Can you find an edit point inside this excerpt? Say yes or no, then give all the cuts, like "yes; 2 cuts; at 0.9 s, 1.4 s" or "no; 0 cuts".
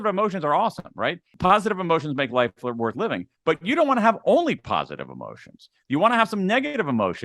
yes; 1 cut; at 1.3 s